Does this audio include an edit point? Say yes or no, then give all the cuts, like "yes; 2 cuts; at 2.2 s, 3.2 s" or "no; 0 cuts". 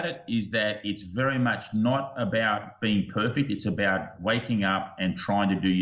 no; 0 cuts